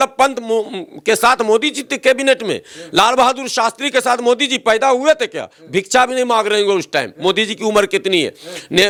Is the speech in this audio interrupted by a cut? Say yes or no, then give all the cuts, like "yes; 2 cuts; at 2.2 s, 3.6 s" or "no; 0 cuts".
no; 0 cuts